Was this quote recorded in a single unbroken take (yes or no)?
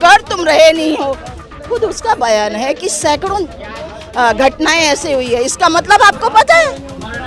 yes